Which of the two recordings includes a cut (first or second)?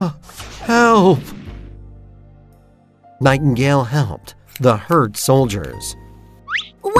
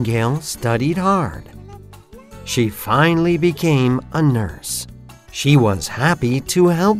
first